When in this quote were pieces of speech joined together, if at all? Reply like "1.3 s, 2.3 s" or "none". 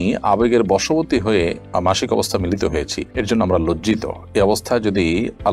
none